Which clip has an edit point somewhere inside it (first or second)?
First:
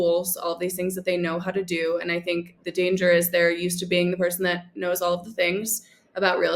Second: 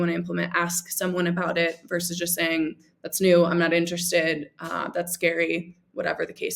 first